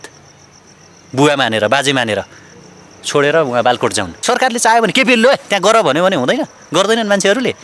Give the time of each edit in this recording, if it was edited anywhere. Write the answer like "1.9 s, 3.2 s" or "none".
4.1 s